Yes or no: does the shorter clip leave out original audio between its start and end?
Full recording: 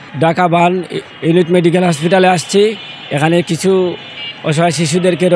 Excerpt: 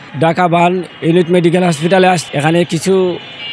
yes